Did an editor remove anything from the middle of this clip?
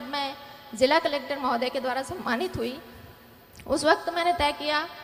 no; 0 cuts

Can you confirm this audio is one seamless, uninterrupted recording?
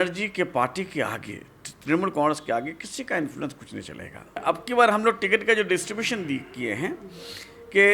no; 1 cut; at 4.3 s

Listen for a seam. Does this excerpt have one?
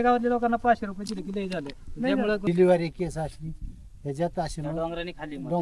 yes; 1 cut; at 2.5 s

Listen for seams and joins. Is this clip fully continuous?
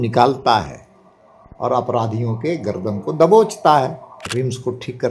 no; 1 cut; at 4.1 s

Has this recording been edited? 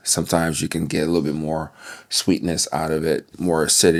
no; 0 cuts

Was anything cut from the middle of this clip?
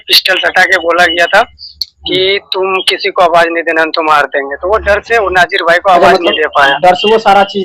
no; 0 cuts

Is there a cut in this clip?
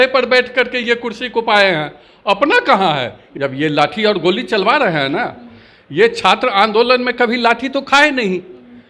yes; 1 cut; at 3.2 s

